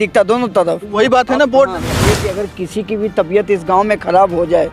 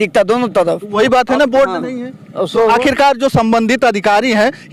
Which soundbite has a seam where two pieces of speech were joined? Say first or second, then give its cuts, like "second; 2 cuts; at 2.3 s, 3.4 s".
first; 1 cut; at 2.2 s